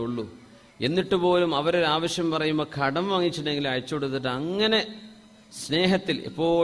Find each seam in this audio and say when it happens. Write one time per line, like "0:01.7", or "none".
none